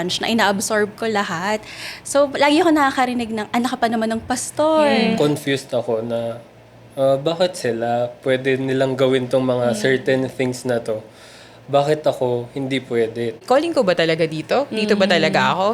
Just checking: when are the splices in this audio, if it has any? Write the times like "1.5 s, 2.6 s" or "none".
5.2 s, 13.4 s